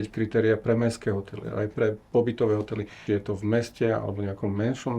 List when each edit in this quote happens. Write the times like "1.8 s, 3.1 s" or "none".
3.0 s